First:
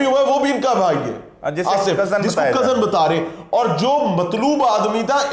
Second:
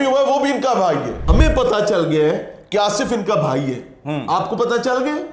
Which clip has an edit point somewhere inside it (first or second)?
second